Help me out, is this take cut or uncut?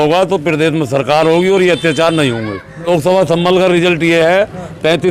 cut